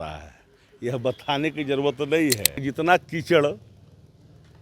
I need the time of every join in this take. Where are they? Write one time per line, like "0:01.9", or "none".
0:02.6